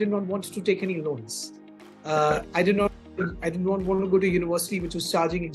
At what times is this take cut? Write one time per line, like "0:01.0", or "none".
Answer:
none

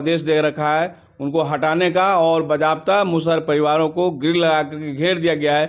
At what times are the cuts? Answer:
none

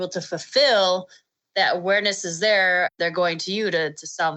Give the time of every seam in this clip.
0:02.9

